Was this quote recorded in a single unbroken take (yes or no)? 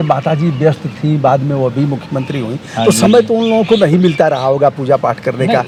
yes